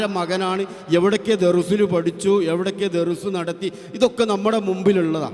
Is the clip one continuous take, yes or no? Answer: yes